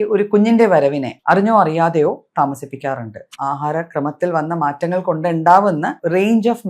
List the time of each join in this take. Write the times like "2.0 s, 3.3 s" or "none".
1.1 s, 3.3 s